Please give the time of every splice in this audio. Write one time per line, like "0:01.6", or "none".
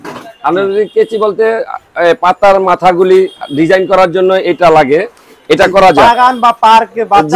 none